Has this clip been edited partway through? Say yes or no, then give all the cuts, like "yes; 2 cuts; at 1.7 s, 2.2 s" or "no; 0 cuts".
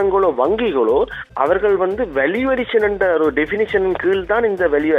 yes; 1 cut; at 1.3 s